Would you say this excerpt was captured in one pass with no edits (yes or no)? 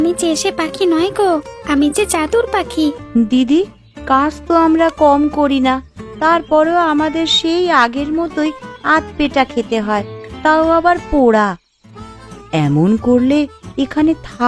no